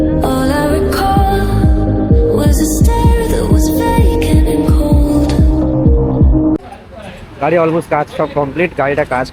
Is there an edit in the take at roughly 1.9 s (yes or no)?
no